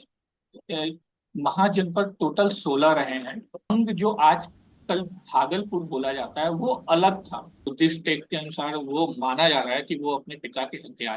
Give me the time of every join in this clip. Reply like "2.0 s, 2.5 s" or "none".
3.7 s, 7.6 s